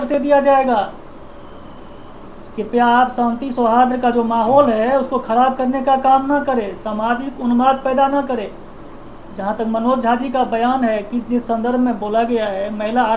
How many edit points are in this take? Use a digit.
0